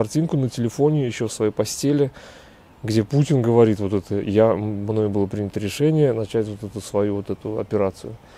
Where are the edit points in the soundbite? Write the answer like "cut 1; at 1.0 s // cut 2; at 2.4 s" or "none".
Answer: none